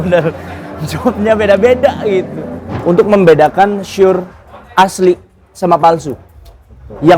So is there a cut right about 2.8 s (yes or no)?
yes